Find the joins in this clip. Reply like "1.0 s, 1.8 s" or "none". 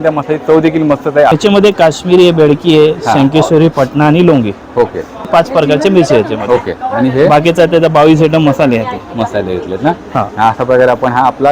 1.3 s, 5.3 s